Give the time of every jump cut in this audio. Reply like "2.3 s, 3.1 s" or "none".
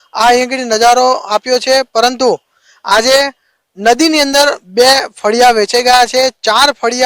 6.1 s